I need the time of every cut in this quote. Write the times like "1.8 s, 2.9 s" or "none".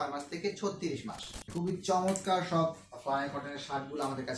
1.4 s